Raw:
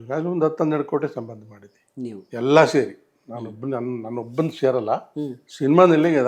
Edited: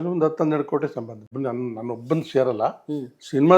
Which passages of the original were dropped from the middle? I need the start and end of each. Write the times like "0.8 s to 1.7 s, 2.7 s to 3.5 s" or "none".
1.4 s to 3.5 s